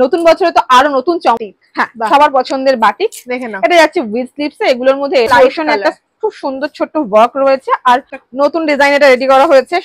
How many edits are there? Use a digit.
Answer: 3